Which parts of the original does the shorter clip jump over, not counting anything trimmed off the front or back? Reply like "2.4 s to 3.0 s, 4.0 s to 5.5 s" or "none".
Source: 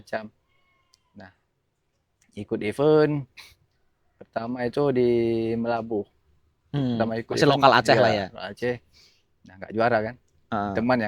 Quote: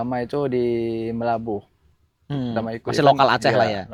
none